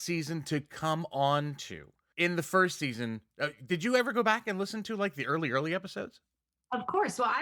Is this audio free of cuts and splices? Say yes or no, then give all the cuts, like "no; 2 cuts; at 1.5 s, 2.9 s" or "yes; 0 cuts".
yes; 0 cuts